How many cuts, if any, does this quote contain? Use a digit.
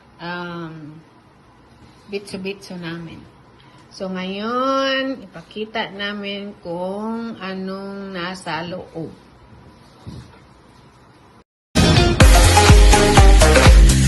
1